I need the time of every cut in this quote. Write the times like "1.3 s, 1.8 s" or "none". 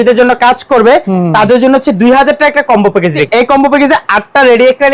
3.3 s

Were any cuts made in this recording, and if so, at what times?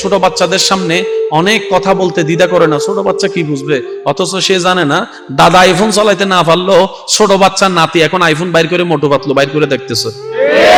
none

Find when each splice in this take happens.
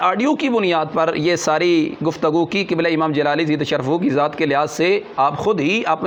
none

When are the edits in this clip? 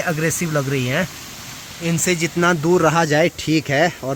none

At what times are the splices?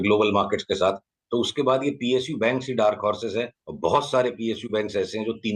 3.6 s

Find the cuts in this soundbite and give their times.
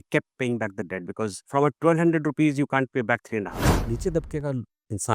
1.4 s, 3.7 s

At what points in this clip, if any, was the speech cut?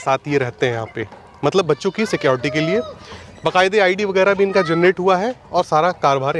none

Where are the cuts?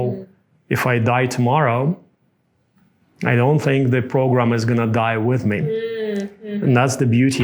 none

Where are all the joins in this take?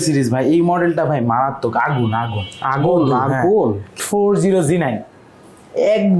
4.0 s

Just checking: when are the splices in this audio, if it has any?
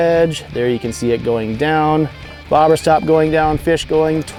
none

